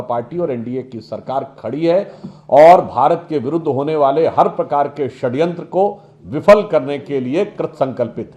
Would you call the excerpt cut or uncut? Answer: uncut